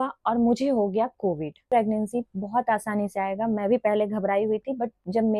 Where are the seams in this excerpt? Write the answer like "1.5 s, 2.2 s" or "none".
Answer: 1.7 s